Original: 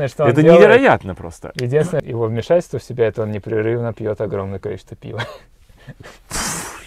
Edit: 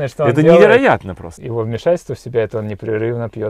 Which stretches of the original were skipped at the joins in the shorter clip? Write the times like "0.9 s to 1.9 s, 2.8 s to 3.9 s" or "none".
1.4 s to 2.1 s